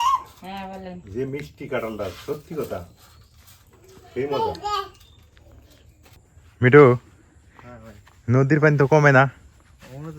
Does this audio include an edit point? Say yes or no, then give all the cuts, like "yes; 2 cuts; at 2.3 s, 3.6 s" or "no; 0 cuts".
yes; 1 cut; at 6.2 s